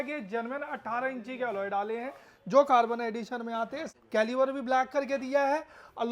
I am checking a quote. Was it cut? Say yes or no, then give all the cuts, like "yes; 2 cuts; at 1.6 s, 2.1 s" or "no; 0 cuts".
yes; 1 cut; at 3.9 s